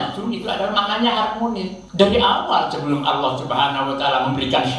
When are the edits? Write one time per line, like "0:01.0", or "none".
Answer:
0:01.8

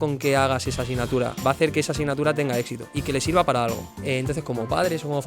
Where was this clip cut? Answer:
0:01.4
0:03.9

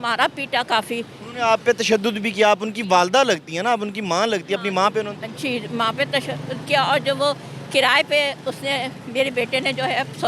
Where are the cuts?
none

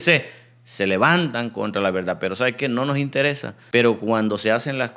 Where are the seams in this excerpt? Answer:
0:03.5

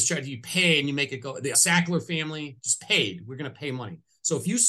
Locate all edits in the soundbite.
0:01.5

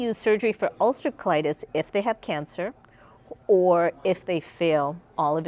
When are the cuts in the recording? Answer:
none

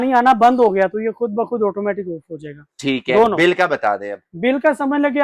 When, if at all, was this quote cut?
none

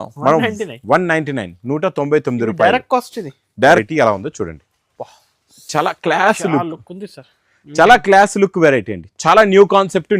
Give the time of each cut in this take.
0:03.8

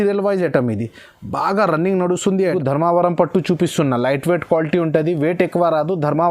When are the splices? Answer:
0:02.4

